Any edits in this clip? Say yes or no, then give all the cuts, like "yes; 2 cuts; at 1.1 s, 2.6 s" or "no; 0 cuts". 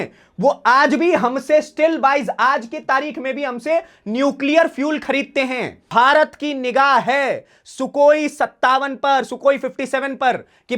yes; 1 cut; at 5.8 s